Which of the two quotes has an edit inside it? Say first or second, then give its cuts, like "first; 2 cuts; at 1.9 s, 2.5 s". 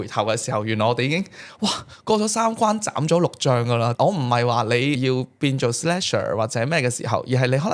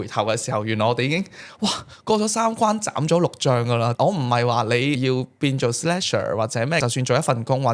second; 1 cut; at 6.8 s